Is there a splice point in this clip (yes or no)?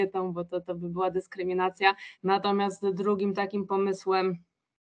yes